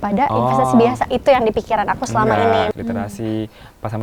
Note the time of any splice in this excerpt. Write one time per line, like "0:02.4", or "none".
0:02.7